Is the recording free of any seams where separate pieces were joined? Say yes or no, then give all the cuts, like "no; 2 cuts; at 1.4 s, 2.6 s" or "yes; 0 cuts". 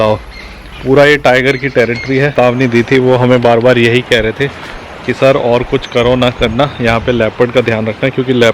no; 1 cut; at 2.3 s